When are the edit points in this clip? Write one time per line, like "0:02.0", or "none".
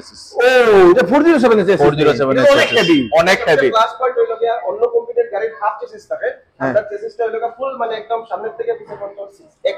none